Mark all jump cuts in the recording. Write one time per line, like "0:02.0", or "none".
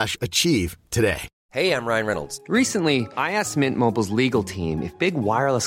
0:01.3